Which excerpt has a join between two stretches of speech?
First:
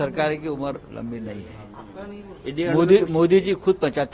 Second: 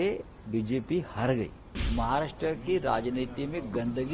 second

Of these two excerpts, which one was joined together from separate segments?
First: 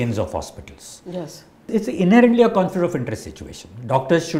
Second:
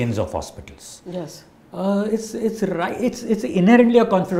first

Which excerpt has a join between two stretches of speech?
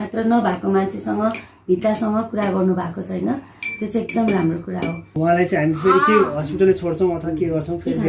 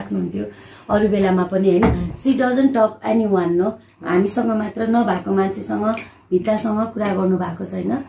first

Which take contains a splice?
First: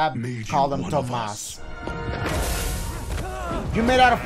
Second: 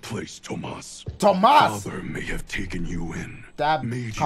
first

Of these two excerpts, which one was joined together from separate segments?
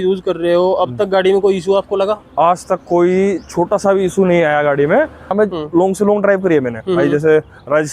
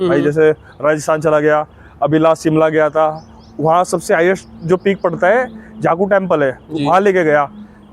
first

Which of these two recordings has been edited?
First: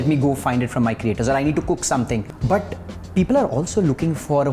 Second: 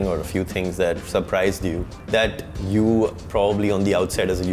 first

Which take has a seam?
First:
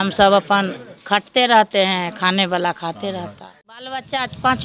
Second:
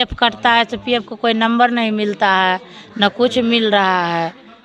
first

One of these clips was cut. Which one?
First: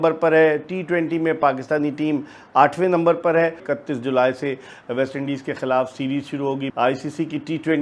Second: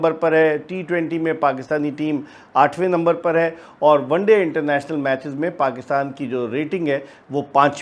first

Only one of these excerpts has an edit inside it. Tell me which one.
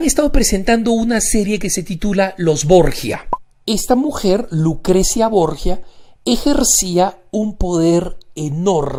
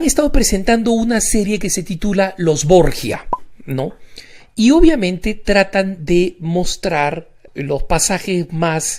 second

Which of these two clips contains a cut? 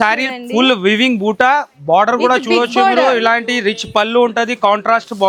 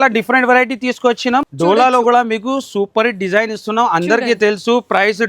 second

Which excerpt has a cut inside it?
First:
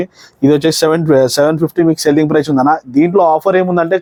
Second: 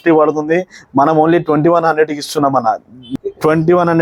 second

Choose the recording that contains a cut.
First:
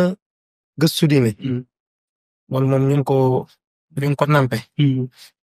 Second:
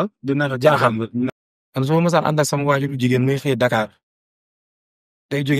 second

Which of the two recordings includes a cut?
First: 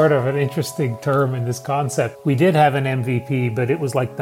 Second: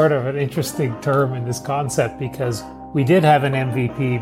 first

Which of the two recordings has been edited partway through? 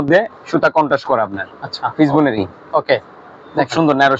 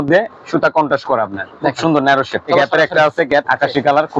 second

